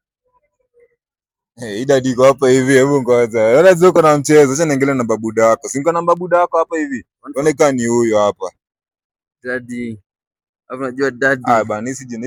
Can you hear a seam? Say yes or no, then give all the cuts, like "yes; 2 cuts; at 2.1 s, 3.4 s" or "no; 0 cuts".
no; 0 cuts